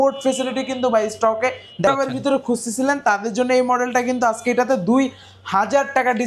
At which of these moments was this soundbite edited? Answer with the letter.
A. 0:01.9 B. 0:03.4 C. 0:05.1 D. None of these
A